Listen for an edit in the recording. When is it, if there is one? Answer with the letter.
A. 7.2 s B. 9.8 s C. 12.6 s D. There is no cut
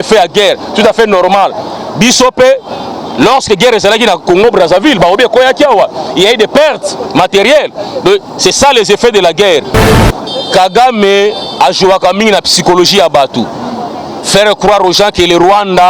B